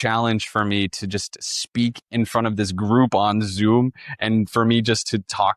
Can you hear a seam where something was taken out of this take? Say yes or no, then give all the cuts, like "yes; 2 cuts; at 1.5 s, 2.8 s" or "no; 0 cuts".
no; 0 cuts